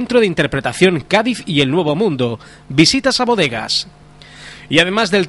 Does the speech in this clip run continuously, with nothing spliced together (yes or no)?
yes